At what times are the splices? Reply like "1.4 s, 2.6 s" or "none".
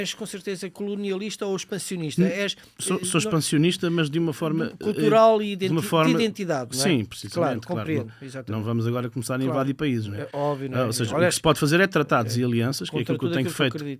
none